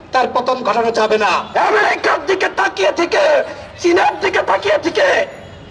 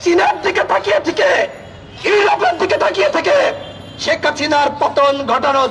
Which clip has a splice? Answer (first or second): first